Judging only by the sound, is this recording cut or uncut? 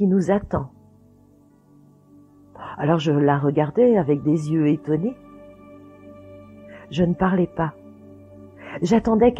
cut